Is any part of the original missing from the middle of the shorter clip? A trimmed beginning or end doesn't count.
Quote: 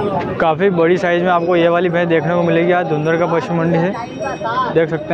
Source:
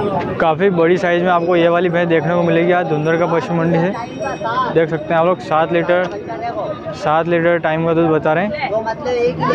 no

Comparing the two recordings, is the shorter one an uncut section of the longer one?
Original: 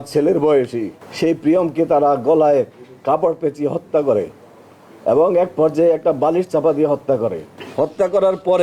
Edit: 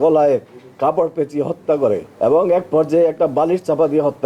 no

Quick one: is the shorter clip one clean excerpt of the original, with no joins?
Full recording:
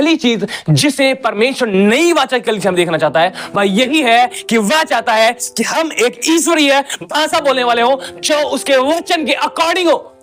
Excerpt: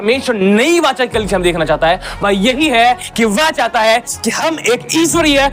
yes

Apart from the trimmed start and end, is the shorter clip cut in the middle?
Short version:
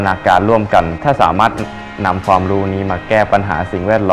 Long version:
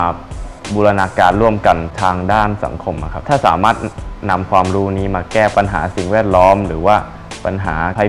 yes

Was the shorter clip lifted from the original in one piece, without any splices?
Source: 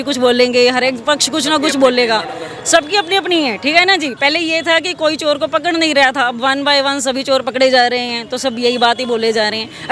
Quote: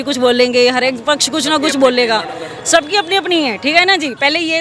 yes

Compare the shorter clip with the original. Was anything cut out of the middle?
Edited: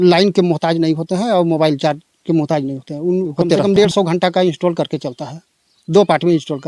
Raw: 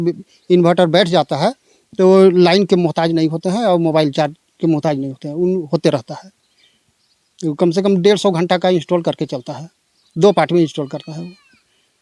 yes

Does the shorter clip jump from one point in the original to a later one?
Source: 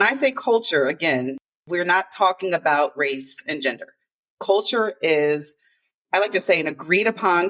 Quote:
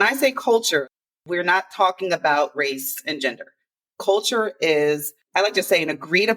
yes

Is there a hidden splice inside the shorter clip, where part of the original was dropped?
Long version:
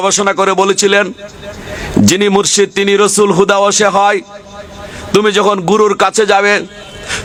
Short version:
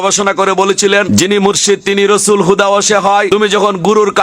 yes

